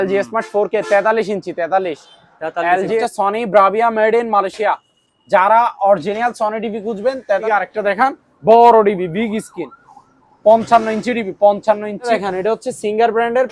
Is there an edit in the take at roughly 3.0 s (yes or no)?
yes